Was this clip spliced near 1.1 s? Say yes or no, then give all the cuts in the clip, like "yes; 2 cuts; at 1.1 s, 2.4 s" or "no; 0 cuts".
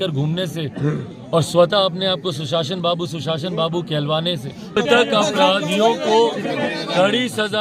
no; 1 cut; at 4.7 s